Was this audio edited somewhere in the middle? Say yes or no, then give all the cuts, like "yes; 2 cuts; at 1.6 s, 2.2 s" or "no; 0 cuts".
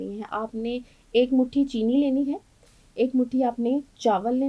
no; 0 cuts